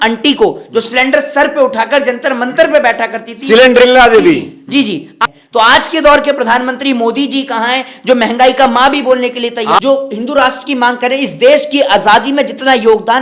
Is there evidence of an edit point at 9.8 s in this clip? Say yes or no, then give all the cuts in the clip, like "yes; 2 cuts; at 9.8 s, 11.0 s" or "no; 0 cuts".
yes; 2 cuts; at 5.1 s, 9.8 s